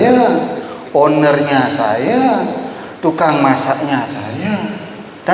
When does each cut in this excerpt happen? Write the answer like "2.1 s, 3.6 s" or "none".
none